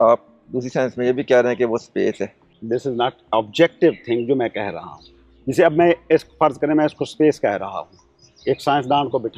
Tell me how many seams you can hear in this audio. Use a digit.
1